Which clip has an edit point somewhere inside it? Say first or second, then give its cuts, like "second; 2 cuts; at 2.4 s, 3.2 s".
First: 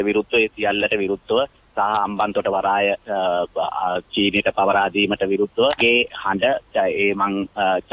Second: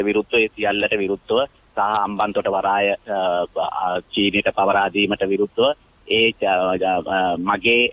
first; 1 cut; at 5.8 s